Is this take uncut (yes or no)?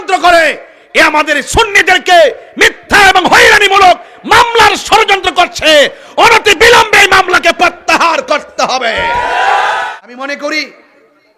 no